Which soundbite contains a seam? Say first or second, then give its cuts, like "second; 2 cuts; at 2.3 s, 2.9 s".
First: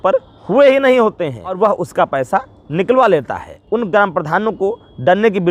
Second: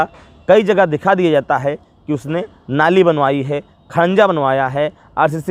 first; 2 cuts; at 1.6 s, 3.5 s